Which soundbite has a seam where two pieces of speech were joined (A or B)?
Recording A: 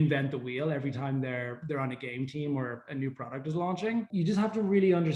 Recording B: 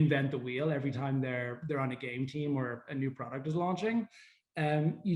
A